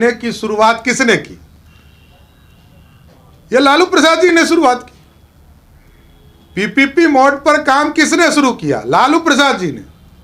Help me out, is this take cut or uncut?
uncut